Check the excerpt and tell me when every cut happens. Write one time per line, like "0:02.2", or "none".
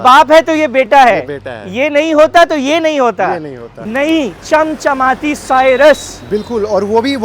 0:03.7